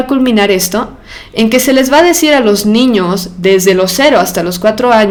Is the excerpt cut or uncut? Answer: uncut